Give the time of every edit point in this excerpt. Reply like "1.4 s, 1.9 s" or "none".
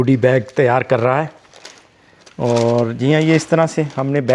none